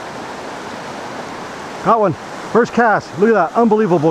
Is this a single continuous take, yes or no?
yes